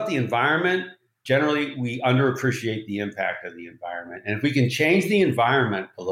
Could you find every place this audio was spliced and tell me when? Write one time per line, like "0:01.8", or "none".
0:01.2

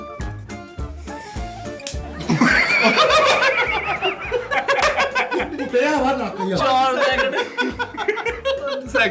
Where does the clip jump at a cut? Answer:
none

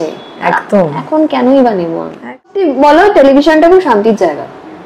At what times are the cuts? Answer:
0:02.5

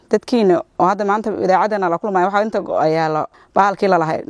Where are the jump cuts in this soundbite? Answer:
0:03.4

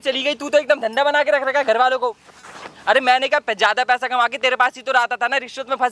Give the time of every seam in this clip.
none

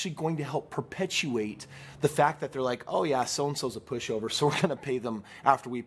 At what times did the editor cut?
none

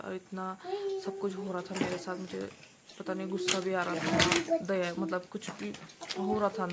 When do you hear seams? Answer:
none

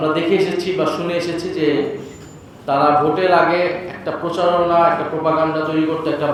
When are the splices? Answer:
none

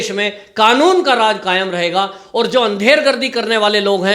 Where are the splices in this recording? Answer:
none

